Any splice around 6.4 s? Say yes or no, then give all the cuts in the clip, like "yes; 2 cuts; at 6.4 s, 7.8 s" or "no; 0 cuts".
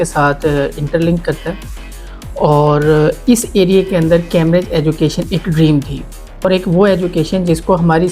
yes; 1 cut; at 6.4 s